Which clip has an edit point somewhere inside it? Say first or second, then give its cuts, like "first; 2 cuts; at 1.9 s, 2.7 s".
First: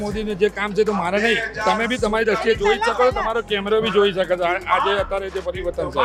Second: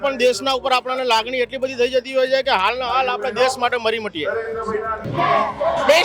second; 1 cut; at 5.0 s